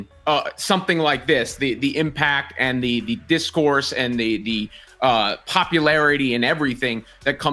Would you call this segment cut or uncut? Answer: uncut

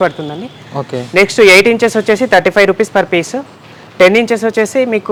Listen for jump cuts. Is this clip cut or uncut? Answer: uncut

